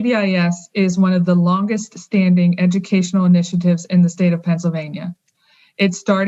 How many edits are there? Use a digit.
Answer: 0